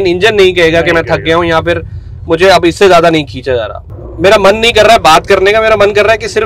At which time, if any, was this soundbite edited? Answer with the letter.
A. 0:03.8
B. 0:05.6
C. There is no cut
A